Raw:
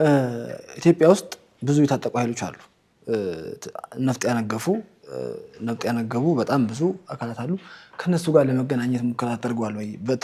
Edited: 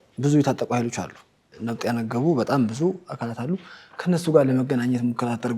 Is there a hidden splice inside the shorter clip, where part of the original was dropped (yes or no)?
yes